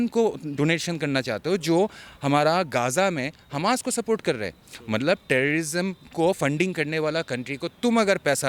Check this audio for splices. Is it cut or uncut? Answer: uncut